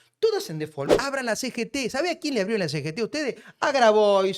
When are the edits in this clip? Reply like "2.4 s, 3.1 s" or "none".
1.0 s

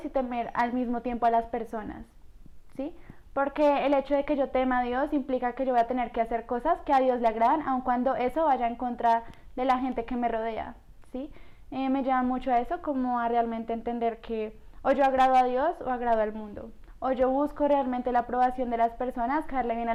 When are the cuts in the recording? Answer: none

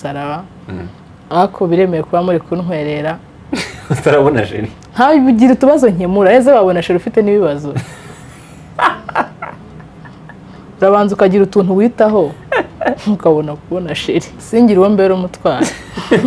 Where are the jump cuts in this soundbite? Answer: 14.4 s

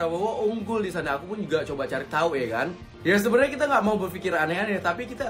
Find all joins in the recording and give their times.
2.8 s

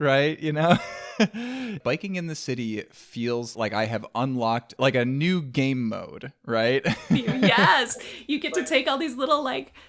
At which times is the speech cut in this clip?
1.8 s, 3.5 s, 4.7 s

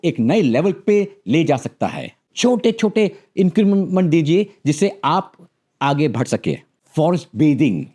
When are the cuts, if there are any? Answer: 2.3 s, 6.7 s

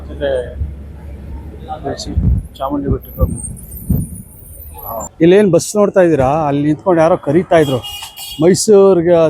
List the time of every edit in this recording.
5.1 s

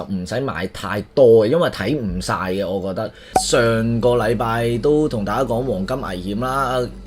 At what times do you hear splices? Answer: 3.3 s

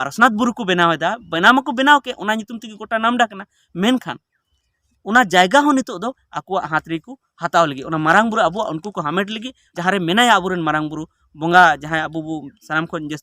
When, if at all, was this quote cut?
9.7 s

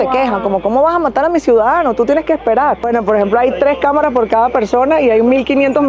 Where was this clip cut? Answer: 2.9 s

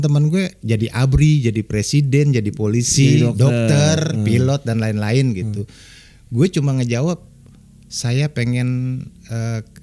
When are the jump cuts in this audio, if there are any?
none

